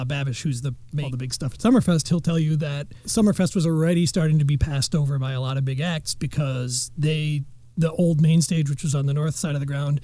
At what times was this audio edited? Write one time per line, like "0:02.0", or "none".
0:01.0